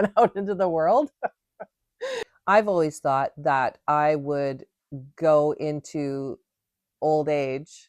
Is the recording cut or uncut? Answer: cut